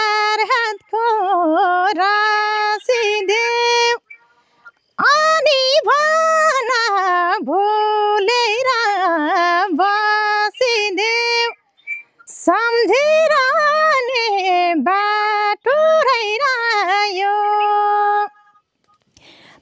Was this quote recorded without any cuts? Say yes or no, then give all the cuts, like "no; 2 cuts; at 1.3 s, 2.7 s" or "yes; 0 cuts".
yes; 0 cuts